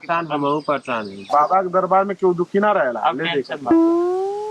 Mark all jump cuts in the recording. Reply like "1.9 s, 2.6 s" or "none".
1.2 s